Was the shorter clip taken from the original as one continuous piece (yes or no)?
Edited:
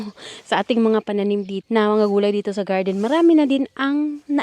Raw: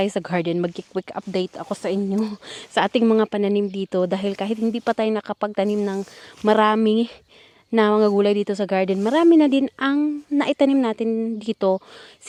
no